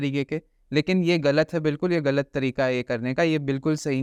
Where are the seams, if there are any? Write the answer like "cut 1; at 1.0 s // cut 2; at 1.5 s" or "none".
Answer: none